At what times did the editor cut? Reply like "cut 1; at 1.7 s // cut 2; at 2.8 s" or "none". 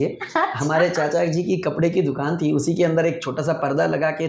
none